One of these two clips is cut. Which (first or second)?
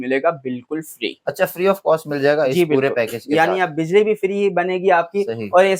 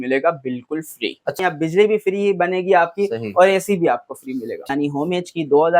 second